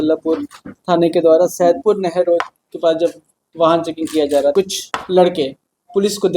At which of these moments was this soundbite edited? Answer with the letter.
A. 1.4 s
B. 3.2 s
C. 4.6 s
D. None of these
C